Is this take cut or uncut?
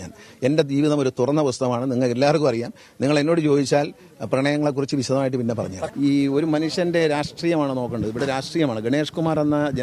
cut